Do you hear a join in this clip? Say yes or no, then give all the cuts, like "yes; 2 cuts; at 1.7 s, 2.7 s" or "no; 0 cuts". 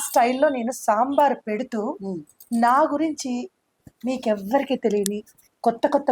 no; 0 cuts